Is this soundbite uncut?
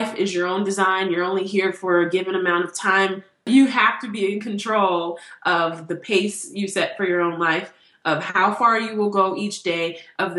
no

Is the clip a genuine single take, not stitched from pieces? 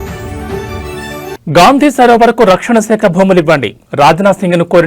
no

